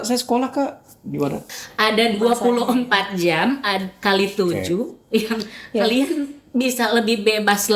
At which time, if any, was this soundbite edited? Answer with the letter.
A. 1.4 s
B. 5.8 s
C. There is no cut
A